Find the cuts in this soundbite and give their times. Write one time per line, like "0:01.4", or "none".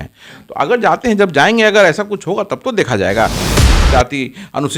0:03.5